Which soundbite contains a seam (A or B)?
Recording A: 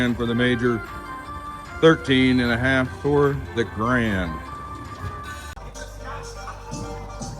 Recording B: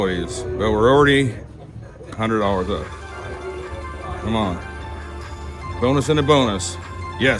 A